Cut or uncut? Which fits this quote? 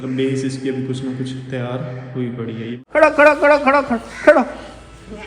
cut